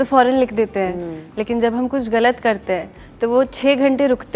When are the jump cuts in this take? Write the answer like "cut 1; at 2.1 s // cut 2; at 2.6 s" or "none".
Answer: none